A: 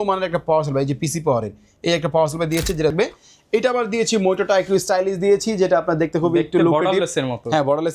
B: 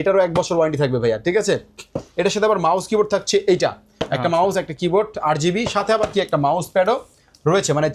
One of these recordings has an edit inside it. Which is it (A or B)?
A